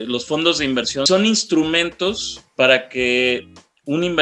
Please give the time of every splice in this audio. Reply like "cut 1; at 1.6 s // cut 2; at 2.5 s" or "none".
cut 1; at 1.1 s